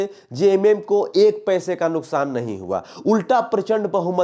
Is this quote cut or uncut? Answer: uncut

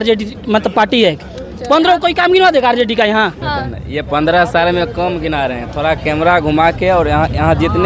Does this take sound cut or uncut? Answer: uncut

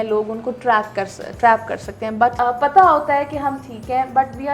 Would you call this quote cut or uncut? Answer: cut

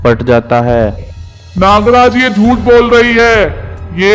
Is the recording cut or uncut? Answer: cut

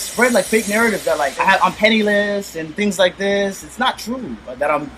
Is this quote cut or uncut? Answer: cut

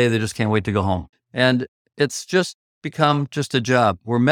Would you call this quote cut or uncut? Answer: cut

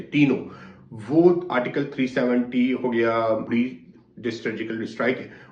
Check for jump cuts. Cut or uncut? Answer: uncut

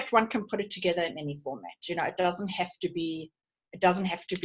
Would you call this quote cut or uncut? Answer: uncut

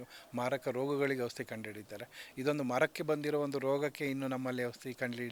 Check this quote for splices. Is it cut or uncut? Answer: uncut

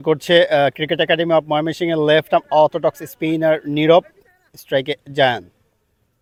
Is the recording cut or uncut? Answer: uncut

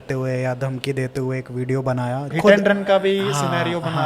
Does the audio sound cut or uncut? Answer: cut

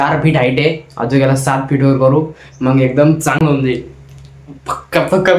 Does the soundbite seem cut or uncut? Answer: uncut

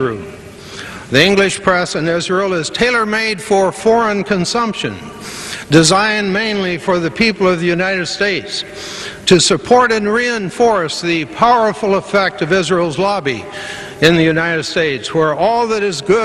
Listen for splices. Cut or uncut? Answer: uncut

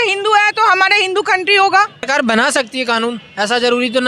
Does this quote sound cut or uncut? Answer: cut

